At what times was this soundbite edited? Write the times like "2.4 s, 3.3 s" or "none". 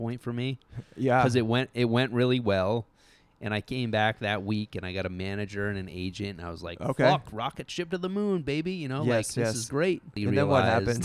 10.1 s

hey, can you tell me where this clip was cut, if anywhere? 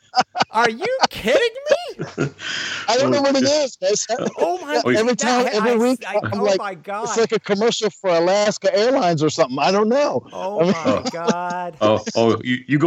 none

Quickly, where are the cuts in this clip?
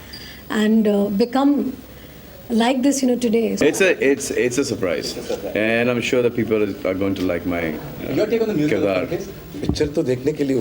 3.6 s, 9.4 s

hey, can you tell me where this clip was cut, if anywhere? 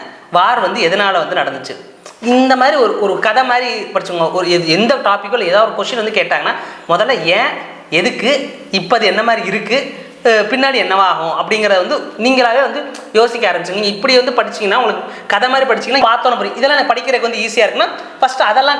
16.0 s

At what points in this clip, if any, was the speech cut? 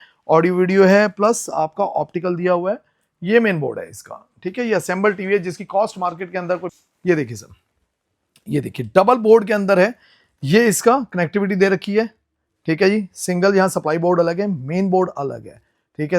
6.7 s

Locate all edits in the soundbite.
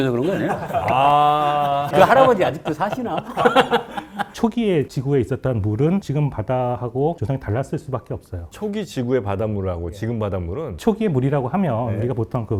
none

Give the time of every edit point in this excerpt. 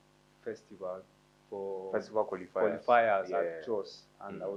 none

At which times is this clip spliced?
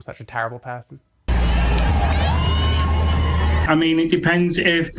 1.3 s, 3.6 s

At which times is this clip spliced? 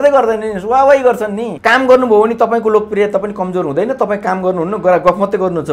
1.5 s

